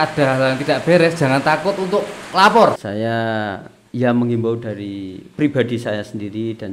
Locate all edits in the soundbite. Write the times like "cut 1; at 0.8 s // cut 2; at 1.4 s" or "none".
cut 1; at 2.8 s